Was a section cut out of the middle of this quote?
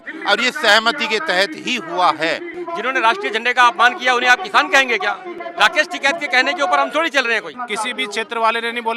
yes; 3 cuts; at 2.6 s, 5.3 s, 7.6 s

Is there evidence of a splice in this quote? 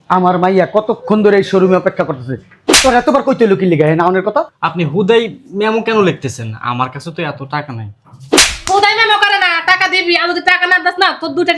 yes; 1 cut; at 4.6 s

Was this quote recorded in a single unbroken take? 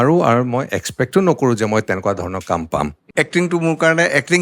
no; 1 cut; at 3.0 s

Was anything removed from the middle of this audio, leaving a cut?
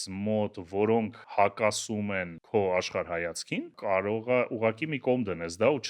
yes; 3 cuts; at 1.2 s, 2.3 s, 3.7 s

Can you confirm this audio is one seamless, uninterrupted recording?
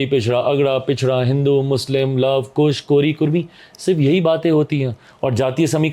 yes; 0 cuts

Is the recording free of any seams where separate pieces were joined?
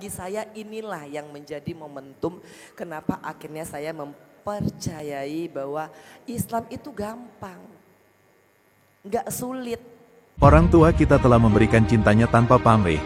no; 1 cut; at 10.4 s

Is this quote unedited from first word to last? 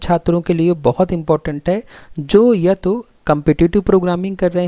yes; 0 cuts

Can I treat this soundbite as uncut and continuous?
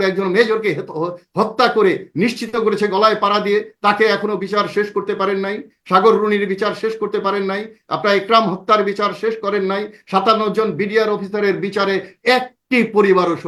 yes; 0 cuts

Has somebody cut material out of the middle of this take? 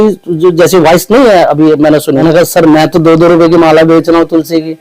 yes; 1 cut; at 2.2 s

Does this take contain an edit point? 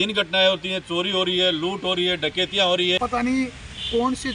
yes; 1 cut; at 3.0 s

